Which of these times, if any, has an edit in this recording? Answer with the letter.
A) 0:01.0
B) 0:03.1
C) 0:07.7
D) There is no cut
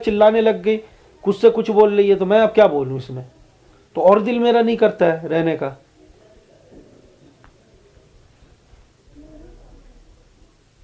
D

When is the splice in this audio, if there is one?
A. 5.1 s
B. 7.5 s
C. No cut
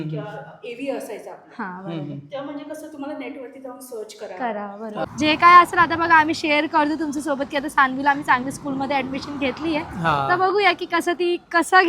A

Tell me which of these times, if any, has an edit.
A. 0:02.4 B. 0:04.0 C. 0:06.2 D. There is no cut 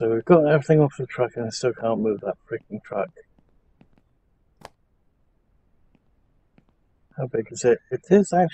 B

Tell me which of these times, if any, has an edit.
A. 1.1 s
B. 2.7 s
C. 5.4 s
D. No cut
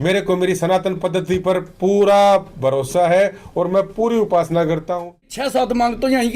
C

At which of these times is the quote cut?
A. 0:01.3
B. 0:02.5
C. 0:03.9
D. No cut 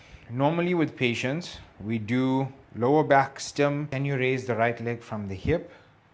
C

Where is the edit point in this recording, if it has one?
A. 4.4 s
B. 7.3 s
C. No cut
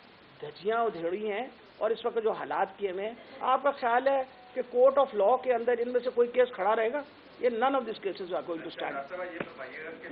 C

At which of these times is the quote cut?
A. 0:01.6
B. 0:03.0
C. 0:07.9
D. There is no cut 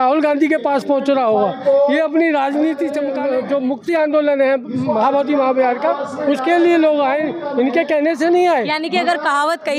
B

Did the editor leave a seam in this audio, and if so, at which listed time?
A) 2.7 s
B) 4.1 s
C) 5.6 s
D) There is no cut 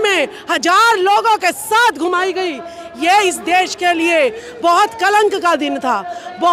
D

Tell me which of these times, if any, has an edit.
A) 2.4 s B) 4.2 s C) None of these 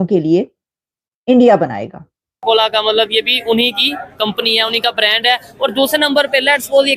A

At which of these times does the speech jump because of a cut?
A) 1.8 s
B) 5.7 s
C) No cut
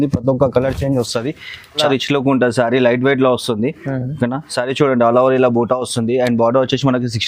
A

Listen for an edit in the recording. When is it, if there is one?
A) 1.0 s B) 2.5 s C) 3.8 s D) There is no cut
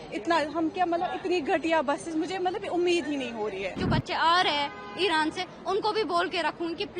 C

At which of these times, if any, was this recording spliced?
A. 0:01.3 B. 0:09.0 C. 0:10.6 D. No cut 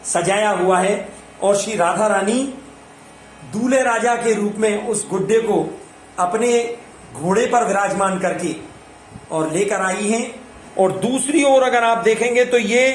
C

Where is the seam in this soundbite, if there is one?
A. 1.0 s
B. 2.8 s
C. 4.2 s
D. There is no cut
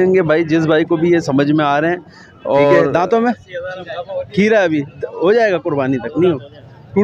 B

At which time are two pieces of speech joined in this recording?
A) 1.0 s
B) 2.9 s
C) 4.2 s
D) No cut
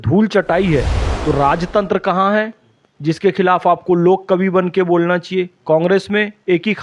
A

